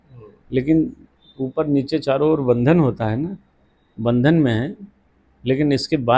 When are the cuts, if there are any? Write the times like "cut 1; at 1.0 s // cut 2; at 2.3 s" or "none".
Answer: none